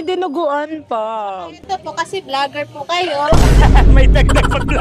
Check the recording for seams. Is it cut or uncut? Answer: uncut